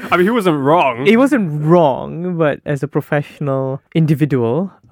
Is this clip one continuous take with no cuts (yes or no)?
yes